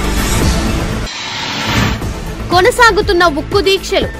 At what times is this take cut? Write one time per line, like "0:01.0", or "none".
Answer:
0:00.9